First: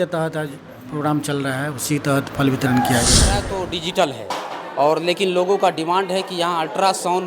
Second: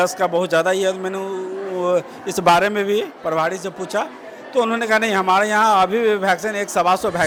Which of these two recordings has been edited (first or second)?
first